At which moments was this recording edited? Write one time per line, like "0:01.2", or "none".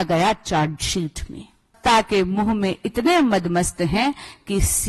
0:01.8